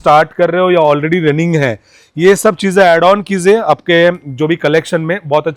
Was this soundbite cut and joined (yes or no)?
no